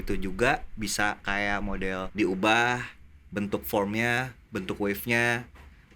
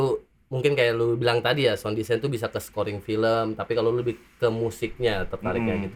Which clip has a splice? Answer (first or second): first